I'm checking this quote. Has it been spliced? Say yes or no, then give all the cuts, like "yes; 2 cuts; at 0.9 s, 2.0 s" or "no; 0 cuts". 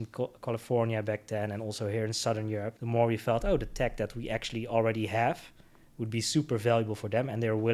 yes; 1 cut; at 2.8 s